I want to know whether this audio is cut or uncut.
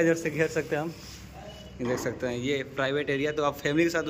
uncut